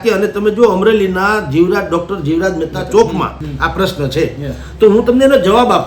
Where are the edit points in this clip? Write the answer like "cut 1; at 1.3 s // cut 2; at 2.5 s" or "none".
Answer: cut 1; at 3.4 s